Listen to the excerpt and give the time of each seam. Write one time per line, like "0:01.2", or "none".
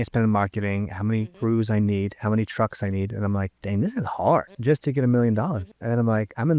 0:01.3
0:03.6
0:04.5
0:05.7

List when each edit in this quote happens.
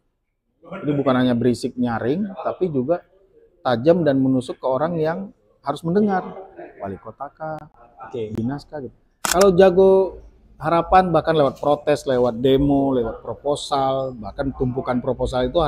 0:09.1

